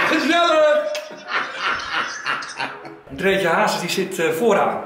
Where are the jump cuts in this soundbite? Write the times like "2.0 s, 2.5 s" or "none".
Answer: 3.1 s